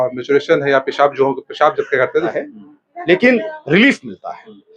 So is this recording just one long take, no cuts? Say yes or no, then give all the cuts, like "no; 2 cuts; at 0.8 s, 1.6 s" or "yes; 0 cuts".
no; 1 cut; at 2.3 s